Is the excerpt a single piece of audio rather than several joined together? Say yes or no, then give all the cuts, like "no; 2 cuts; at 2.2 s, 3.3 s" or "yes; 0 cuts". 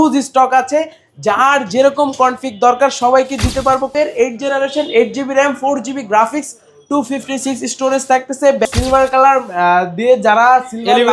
no; 2 cuts; at 3.9 s, 8.6 s